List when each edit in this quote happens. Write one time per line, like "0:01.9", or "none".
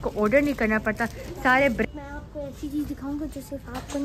0:01.8